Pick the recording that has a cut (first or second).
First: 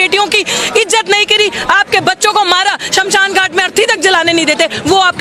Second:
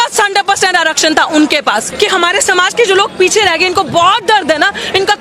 second